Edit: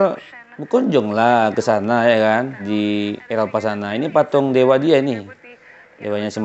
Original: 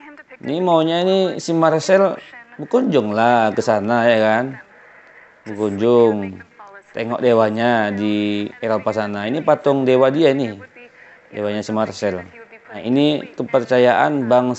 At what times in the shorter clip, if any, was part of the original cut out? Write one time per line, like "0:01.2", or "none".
0:02.6